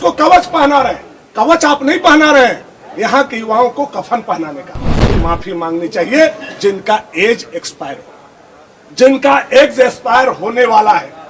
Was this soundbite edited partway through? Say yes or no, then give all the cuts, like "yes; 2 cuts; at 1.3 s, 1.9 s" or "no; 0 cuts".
yes; 1 cut; at 5.1 s